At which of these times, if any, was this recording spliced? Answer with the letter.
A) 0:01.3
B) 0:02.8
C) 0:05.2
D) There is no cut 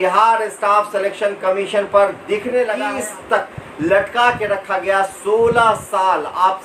B